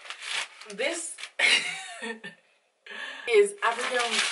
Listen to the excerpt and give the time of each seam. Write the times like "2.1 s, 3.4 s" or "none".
3.1 s

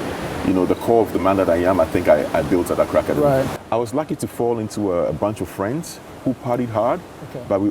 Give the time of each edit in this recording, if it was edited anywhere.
3.5 s

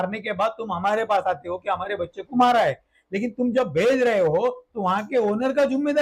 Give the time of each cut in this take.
none

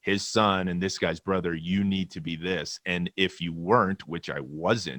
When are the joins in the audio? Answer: none

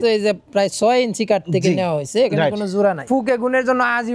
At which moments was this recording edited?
3.0 s

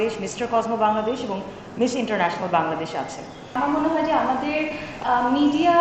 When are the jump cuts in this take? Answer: 3.6 s

